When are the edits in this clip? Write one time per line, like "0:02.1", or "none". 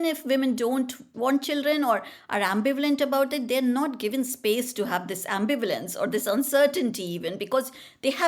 0:01.1